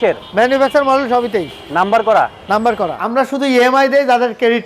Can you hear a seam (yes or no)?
yes